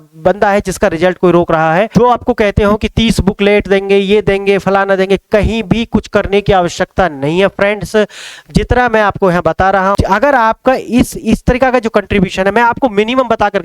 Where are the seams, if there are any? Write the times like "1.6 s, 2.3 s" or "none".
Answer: 1.9 s, 10.0 s